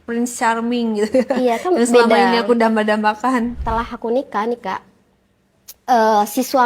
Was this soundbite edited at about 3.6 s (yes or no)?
yes